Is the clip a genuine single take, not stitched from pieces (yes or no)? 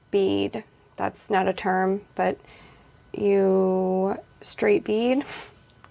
yes